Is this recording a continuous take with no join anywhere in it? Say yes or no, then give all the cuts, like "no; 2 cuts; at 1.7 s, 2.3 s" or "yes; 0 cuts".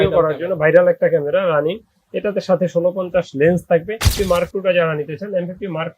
no; 1 cut; at 4.0 s